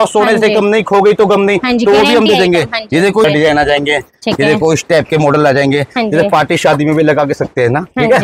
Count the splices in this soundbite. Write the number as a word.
one